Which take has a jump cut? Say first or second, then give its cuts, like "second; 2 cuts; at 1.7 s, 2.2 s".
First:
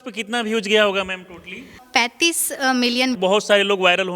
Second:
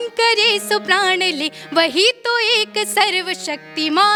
first; 2 cuts; at 1.8 s, 3.2 s